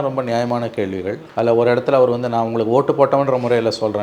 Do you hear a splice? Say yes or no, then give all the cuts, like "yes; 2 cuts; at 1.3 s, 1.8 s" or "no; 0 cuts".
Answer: yes; 1 cut; at 1.2 s